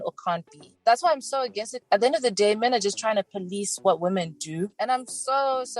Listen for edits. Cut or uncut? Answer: cut